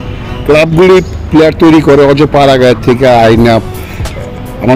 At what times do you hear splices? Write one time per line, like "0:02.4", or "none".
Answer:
0:03.7